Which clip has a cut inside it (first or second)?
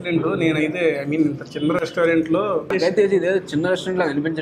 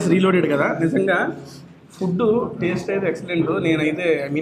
first